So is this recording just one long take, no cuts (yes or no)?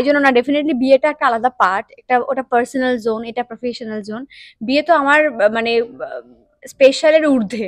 yes